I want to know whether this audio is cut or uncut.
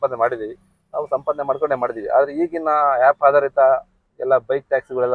uncut